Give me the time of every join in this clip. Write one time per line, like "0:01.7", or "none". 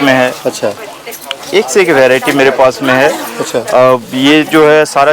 none